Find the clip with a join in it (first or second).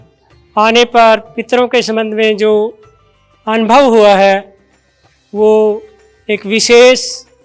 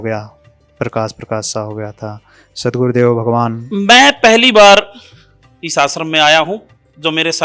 second